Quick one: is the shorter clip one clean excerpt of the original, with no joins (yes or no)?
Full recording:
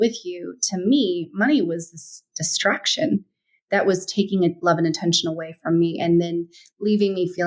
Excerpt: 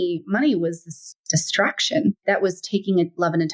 no